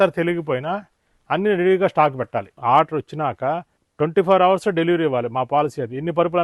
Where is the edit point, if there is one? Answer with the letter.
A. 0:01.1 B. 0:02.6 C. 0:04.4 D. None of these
B